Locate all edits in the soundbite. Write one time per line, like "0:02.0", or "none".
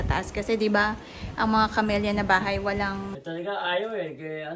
0:03.2